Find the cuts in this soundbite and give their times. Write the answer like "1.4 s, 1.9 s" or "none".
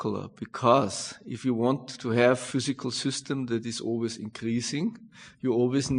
2.4 s